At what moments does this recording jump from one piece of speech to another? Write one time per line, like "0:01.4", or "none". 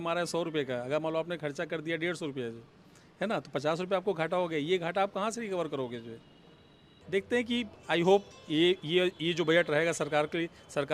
0:06.9

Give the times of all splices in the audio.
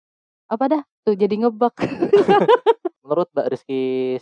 0:02.9

